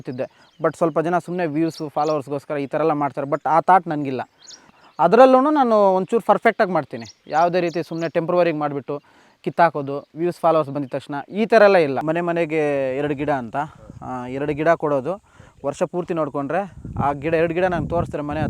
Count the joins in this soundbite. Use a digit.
2